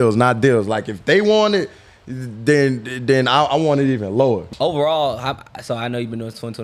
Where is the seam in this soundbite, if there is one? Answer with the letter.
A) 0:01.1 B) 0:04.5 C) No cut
B